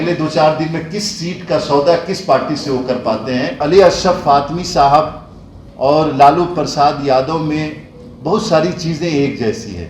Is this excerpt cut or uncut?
cut